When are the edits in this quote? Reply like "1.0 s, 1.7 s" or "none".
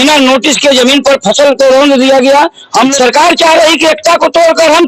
2.9 s